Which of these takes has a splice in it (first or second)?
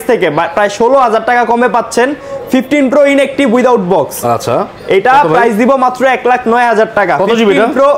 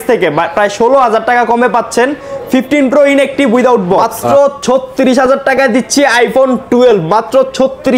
second